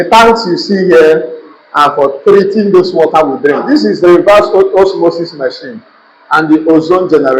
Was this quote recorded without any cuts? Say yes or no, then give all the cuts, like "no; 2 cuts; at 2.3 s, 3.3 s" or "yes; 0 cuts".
no; 1 cut; at 3.6 s